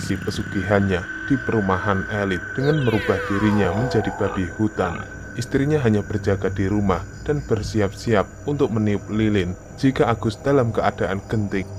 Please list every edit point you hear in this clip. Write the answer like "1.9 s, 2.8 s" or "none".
none

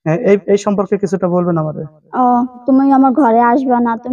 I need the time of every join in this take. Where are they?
2.6 s

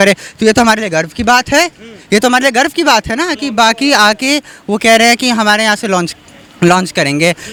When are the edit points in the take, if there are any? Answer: none

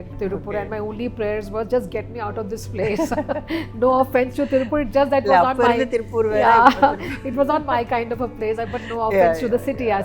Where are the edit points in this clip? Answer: none

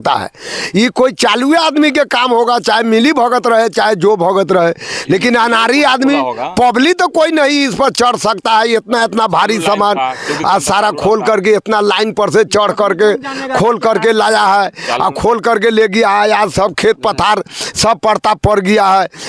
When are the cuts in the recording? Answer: none

